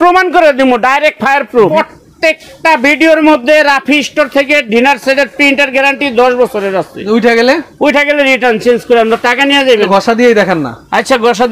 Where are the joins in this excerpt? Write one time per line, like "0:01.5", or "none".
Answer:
0:01.7
0:09.9